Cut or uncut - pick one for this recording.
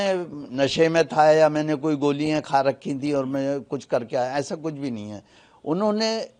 uncut